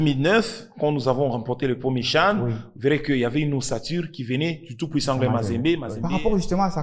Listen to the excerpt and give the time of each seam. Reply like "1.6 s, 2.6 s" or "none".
5.9 s